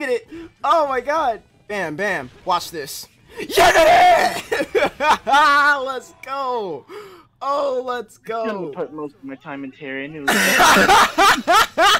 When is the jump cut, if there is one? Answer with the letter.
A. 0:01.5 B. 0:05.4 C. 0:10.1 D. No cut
A